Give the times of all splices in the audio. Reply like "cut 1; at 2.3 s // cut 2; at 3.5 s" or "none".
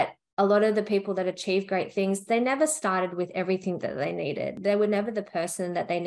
cut 1; at 4.5 s